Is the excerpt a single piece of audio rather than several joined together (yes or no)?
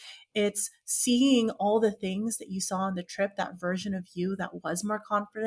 yes